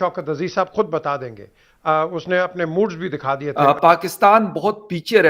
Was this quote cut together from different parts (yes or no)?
yes